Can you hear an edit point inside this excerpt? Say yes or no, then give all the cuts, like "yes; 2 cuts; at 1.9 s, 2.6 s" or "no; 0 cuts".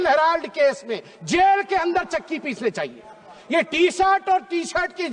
no; 0 cuts